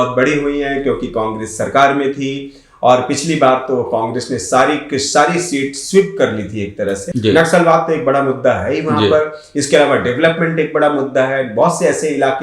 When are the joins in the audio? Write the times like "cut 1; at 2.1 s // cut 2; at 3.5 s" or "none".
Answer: cut 1; at 7.1 s